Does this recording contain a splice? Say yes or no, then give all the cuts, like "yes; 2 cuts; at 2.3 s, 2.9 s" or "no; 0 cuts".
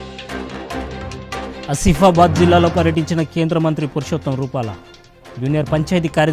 no; 0 cuts